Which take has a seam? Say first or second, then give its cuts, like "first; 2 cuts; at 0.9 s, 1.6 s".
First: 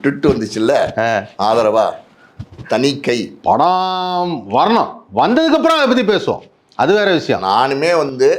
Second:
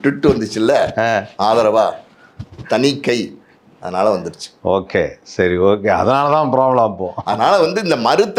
first; 1 cut; at 3.3 s